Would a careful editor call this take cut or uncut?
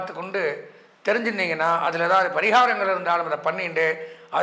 uncut